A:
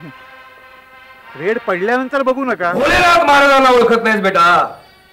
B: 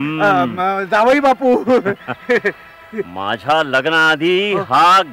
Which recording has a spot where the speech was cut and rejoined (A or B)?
A